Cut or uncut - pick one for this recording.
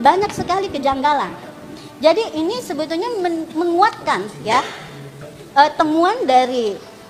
uncut